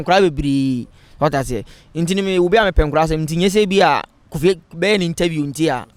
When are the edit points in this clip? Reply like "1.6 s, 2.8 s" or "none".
none